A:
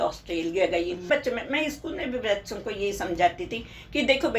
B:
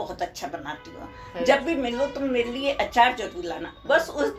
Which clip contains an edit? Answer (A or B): A